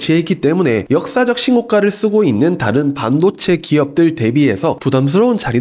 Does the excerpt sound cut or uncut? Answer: uncut